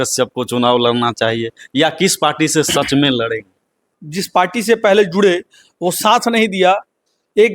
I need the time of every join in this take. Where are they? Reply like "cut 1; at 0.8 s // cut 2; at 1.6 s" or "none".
cut 1; at 4.0 s